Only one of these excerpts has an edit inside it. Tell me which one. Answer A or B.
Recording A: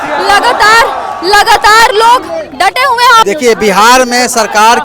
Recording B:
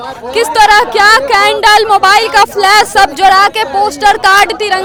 A